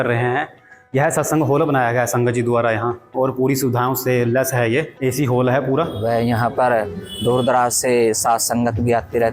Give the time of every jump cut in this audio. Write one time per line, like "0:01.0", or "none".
0:03.1
0:04.9
0:06.0